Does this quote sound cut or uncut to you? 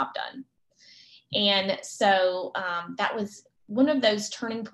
uncut